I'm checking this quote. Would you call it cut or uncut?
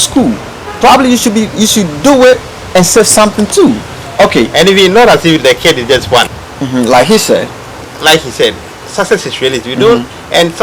cut